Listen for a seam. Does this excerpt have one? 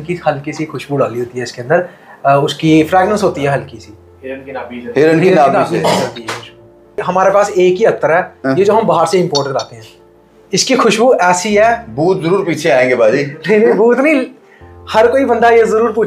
yes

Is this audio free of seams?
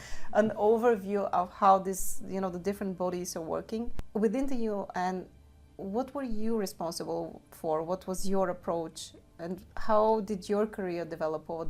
no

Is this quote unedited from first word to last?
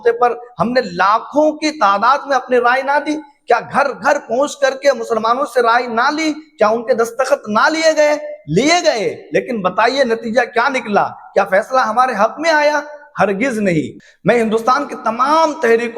no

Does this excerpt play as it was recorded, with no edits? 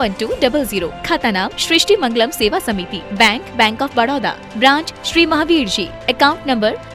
yes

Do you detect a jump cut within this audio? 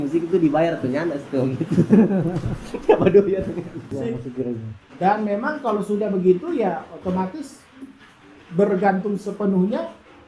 yes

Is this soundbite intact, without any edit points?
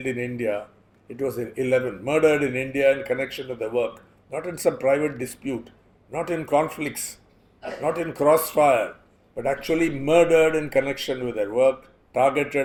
yes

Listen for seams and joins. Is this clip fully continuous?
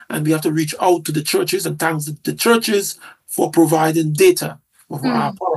yes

